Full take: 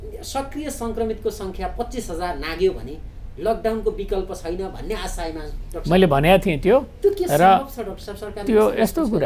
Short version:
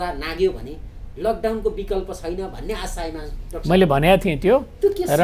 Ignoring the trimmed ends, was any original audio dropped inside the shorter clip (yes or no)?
no